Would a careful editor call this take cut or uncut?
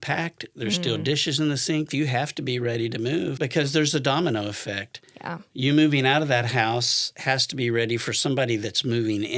cut